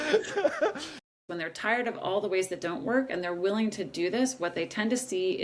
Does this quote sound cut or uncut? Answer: cut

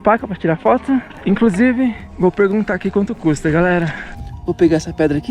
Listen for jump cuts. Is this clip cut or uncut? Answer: cut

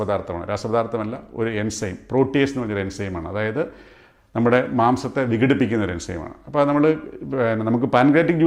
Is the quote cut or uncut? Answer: uncut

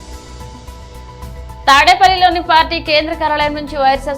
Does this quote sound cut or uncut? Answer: cut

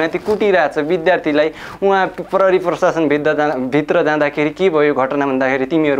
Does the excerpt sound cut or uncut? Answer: uncut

